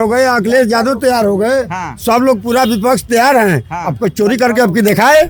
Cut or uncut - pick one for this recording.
uncut